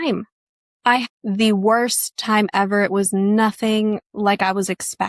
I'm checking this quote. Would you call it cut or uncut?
cut